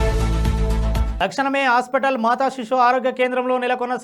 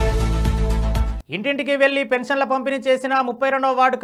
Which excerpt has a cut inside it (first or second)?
first